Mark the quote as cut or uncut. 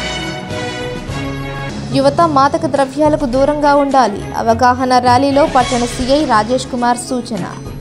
cut